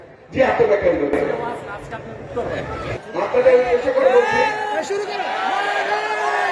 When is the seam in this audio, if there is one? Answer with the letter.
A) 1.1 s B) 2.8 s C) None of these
B